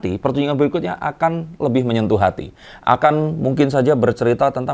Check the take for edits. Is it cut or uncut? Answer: uncut